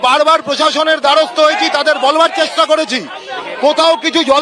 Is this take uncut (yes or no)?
yes